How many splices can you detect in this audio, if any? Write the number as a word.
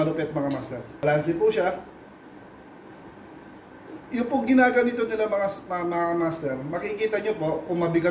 one